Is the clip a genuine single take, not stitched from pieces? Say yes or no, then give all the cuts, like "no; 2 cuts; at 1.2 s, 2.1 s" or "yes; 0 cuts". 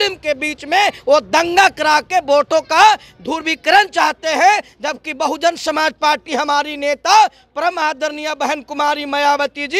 yes; 0 cuts